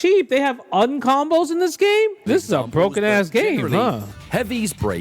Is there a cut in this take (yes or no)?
yes